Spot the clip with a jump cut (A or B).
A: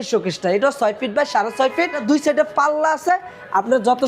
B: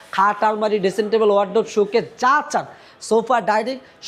A